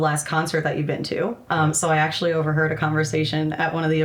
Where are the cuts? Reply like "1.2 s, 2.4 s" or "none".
1.4 s